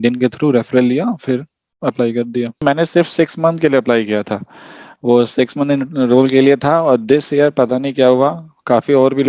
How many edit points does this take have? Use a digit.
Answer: 1